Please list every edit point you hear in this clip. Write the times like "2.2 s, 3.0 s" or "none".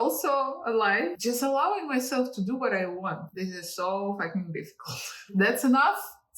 1.2 s, 5.3 s